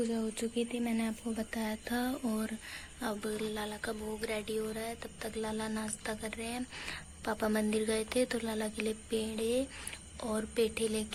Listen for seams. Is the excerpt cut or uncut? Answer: uncut